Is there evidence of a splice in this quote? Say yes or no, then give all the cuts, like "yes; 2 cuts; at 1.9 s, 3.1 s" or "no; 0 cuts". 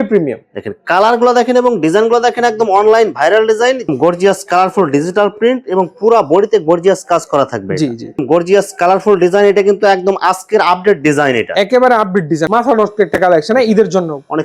yes; 3 cuts; at 3.9 s, 8.1 s, 12.4 s